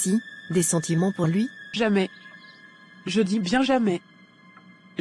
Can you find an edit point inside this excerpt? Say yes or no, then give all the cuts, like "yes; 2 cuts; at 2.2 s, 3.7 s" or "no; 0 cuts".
yes; 1 cut; at 1.6 s